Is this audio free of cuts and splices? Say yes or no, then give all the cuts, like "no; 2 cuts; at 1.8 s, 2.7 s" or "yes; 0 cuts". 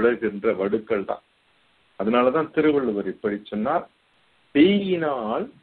yes; 0 cuts